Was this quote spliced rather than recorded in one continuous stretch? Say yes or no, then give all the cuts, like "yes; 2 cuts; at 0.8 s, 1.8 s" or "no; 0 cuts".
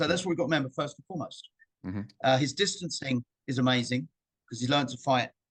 no; 0 cuts